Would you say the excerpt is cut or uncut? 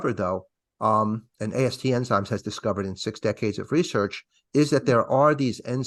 uncut